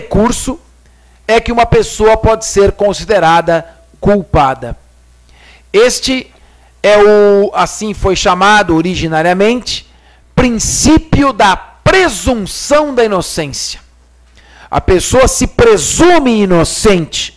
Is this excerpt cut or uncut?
uncut